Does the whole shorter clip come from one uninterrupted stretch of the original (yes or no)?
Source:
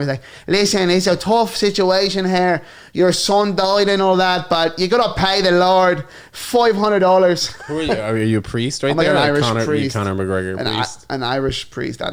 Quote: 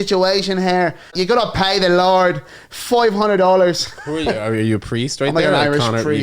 no